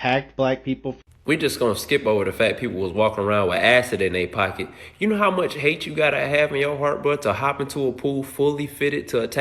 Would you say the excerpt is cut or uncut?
uncut